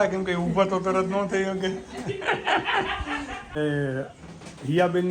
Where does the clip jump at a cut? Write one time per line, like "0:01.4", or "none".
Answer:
0:03.6